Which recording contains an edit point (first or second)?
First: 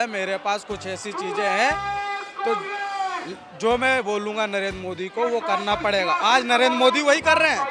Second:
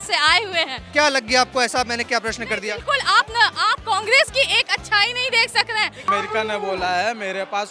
second